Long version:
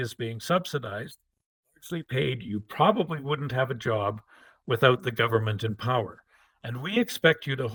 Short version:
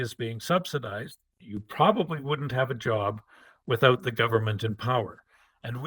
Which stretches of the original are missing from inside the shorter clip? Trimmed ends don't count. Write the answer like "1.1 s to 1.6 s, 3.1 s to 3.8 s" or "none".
1.6 s to 2.6 s

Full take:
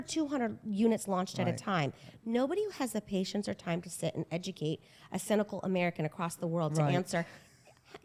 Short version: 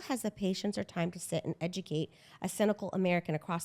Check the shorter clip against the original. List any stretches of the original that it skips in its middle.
none

